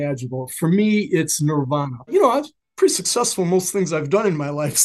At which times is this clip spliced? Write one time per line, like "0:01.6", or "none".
0:02.1